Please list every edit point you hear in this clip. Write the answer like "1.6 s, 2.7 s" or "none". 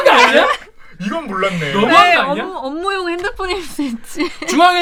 none